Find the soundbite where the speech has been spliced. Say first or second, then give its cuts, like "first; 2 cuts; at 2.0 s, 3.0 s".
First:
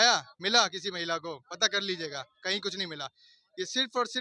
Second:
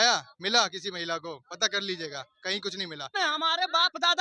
second; 1 cut; at 3.1 s